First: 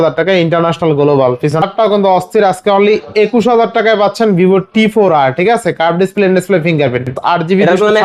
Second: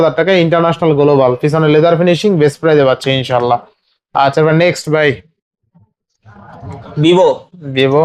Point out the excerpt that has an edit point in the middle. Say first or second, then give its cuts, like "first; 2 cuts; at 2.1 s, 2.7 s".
first; 2 cuts; at 1.6 s, 7.2 s